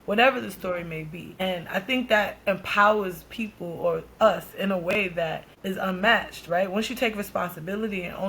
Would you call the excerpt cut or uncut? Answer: cut